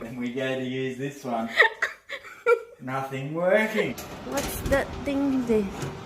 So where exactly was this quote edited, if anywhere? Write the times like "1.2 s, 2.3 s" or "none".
4.1 s